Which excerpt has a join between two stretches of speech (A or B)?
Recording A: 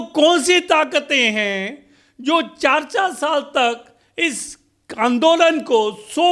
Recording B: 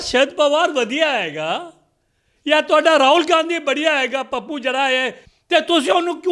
B